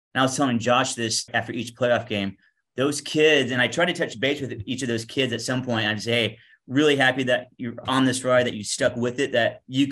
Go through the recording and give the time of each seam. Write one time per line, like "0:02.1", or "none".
0:01.3